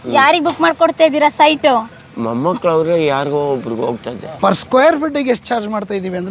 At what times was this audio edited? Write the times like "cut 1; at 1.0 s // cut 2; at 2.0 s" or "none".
cut 1; at 4.3 s